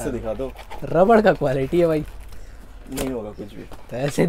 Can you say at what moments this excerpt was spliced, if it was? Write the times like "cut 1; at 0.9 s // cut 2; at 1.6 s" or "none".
none